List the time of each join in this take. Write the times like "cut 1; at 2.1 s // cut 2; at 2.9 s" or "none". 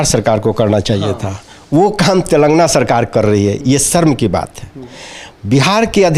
none